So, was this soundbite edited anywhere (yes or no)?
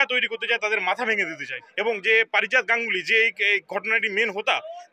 yes